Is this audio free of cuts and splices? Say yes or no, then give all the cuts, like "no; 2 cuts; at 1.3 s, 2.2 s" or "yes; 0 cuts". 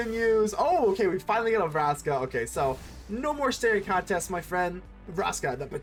yes; 0 cuts